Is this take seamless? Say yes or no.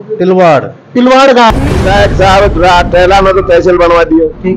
no